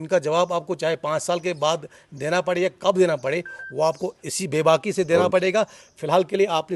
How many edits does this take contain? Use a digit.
0